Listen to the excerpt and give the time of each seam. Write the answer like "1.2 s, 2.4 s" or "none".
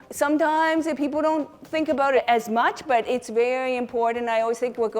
2.2 s

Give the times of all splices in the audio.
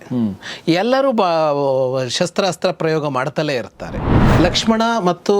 4.3 s

